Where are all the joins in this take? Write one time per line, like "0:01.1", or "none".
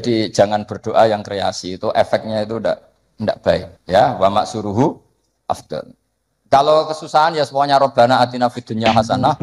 0:03.7

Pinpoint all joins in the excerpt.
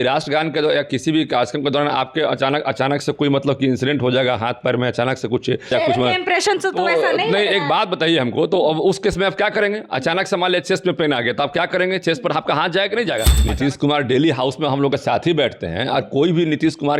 0:05.7
0:13.4

